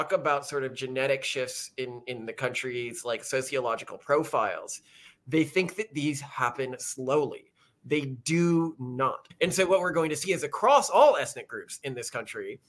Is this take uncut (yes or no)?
no